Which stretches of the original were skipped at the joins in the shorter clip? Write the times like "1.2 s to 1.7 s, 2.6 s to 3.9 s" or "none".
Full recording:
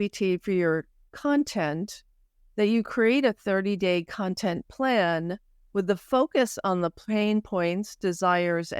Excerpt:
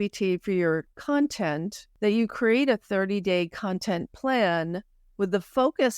0.9 s to 1.1 s, 2.0 s to 2.4 s